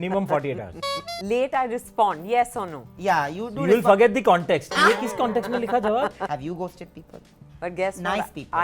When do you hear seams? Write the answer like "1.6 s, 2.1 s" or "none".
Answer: 1.1 s, 6.2 s